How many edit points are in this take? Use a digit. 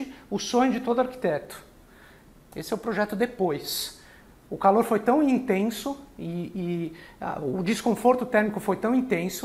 0